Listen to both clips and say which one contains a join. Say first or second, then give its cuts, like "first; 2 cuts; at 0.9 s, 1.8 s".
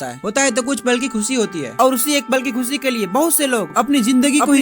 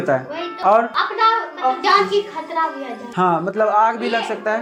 first; 1 cut; at 1.7 s